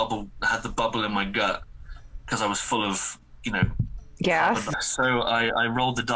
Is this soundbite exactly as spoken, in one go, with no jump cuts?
no; 1 cut; at 4.7 s

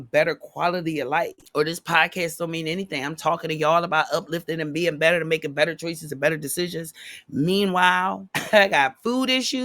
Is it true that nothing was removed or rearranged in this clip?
no; 2 cuts; at 1.4 s, 8.3 s

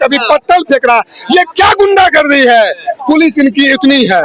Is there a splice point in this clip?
no; 0 cuts

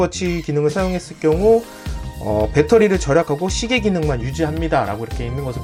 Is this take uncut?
yes; 0 cuts

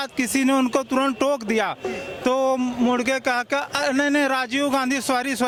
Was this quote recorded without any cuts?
yes; 0 cuts

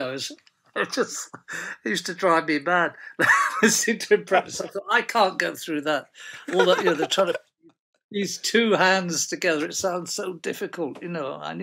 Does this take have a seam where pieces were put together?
no; 0 cuts

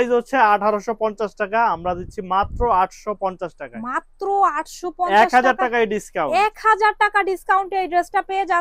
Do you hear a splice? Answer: no; 0 cuts

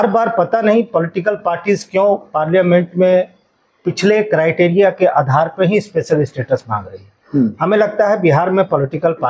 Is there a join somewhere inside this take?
no; 0 cuts

